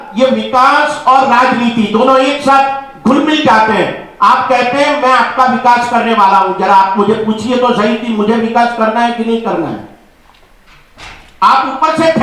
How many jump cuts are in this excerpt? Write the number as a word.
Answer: zero